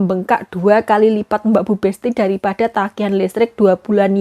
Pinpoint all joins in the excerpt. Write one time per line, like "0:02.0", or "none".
none